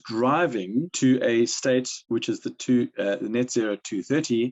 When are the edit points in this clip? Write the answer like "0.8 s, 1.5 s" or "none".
0.9 s, 2.0 s